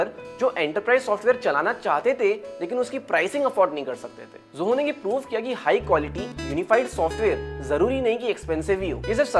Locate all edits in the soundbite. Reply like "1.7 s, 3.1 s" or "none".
none

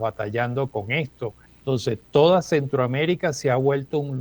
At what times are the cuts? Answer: 1.5 s

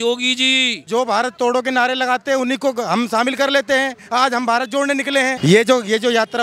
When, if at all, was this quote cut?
0.8 s, 5.4 s

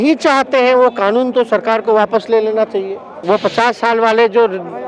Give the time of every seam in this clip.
3.2 s

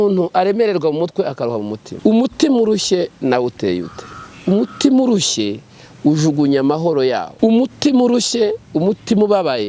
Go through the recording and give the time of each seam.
1.8 s, 7.3 s

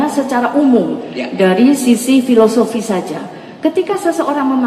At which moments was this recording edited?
none

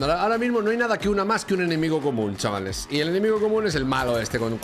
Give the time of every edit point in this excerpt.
none

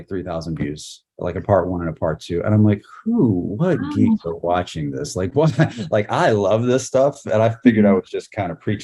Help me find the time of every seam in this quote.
none

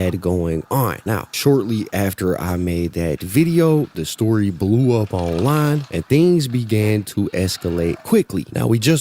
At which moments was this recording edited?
none

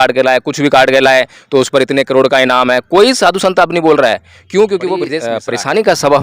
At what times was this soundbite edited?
5.3 s

